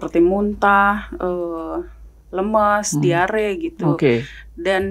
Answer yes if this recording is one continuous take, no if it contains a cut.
yes